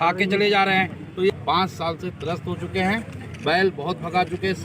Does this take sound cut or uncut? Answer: cut